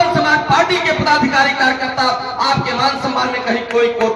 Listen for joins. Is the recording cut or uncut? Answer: uncut